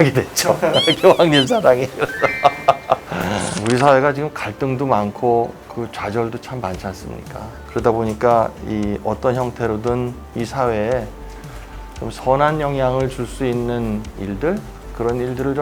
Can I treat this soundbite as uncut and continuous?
no; 1 cut; at 3.6 s

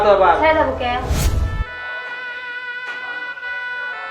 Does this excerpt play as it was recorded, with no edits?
no; 1 cut; at 1.4 s

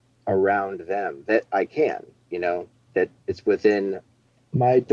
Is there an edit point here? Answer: yes; 1 cut; at 2.9 s

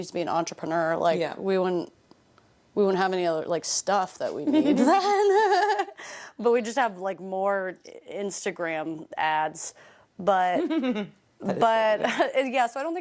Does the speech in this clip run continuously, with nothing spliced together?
yes; 0 cuts

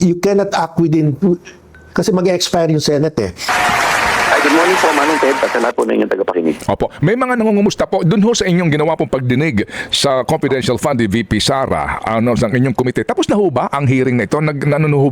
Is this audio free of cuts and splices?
no; 1 cut; at 3.5 s

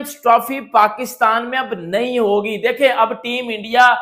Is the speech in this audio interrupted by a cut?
no; 0 cuts

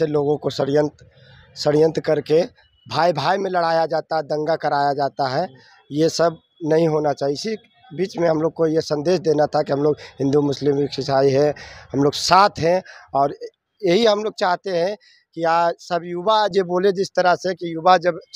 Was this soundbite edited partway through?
no; 0 cuts

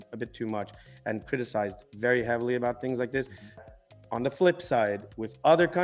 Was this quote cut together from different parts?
yes; 1 cut; at 3.6 s

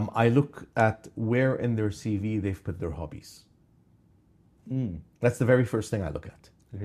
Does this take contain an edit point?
no; 0 cuts

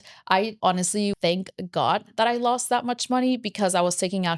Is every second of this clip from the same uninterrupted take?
no; 1 cut; at 1.0 s

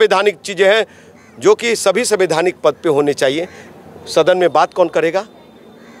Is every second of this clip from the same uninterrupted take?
yes; 0 cuts

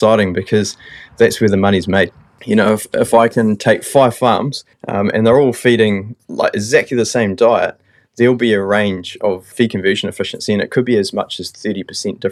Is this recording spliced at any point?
no; 0 cuts

